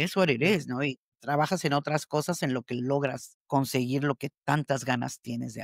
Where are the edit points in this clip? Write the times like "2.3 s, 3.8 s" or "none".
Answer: 1.1 s, 3.3 s